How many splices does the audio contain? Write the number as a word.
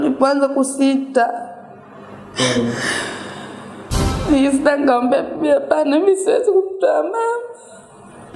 one